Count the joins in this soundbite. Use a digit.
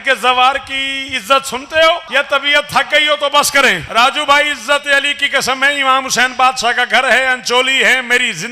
2